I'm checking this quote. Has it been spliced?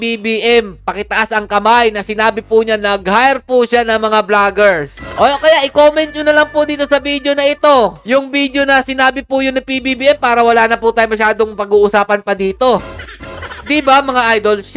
no; 0 cuts

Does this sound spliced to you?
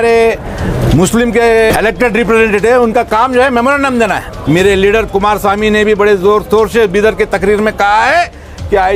yes; 2 cuts; at 1.7 s, 4.3 s

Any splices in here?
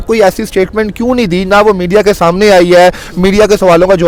no; 0 cuts

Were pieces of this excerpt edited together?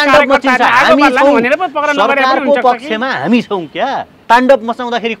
yes; 1 cut; at 4.1 s

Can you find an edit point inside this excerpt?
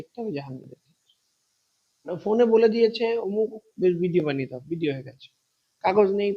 yes; 1 cut; at 2.1 s

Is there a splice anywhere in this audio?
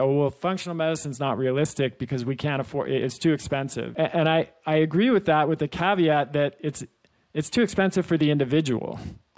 yes; 1 cut; at 3.8 s

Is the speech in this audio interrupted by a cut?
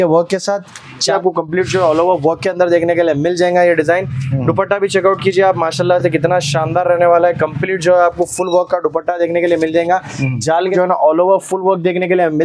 yes; 2 cuts; at 1.1 s, 10.7 s

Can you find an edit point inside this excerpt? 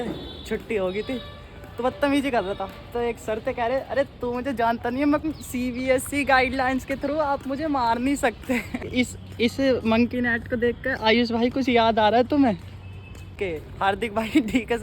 yes; 3 cuts; at 5.2 s, 8.9 s, 13.3 s

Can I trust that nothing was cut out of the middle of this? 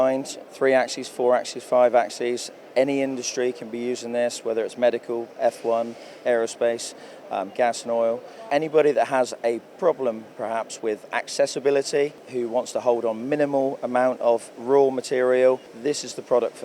no; 3 cuts; at 8.5 s, 12.2 s, 15.7 s

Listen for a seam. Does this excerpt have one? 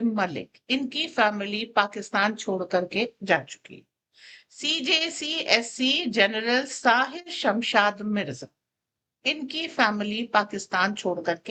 no; 0 cuts

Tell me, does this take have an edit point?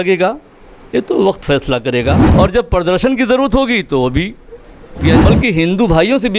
yes; 2 cuts; at 2.2 s, 5.2 s

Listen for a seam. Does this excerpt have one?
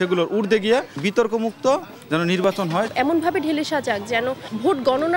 yes; 1 cut; at 2.9 s

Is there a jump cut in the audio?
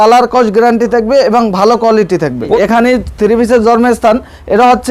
yes; 1 cut; at 2.6 s

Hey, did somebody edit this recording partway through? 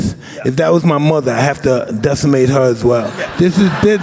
no; 0 cuts

